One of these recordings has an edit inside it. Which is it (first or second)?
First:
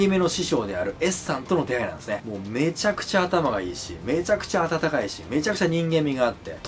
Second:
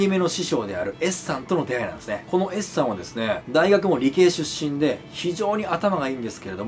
first